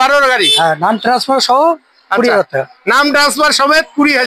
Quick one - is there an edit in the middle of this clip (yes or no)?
no